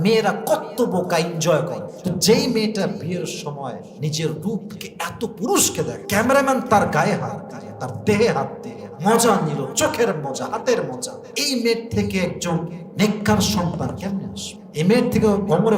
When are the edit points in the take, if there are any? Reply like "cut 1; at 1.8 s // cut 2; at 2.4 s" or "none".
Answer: cut 1; at 1.9 s // cut 2; at 6.0 s